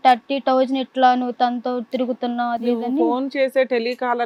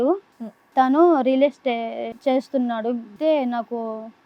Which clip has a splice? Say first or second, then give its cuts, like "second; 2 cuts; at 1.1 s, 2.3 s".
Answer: second; 2 cuts; at 2.1 s, 3.1 s